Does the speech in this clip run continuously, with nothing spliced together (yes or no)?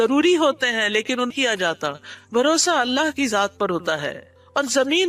no